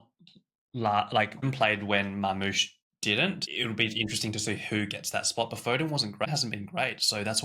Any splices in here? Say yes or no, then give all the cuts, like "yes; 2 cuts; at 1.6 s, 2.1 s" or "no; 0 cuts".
yes; 3 cuts; at 1.5 s, 3.3 s, 6.3 s